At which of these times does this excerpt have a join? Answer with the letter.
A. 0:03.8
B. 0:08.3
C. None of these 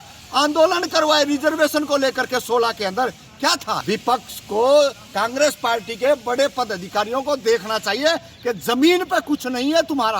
A